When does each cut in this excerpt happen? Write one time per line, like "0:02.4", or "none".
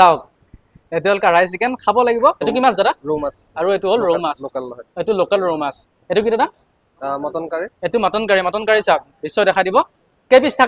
0:02.4